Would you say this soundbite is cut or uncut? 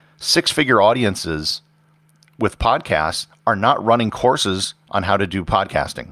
uncut